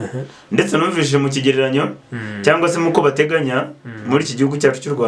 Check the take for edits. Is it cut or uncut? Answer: uncut